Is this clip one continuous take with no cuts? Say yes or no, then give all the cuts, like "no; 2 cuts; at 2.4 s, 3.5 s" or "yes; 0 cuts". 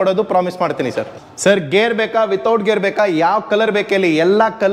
no; 1 cut; at 1.2 s